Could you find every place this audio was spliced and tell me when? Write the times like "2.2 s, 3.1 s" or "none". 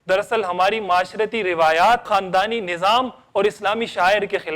2.0 s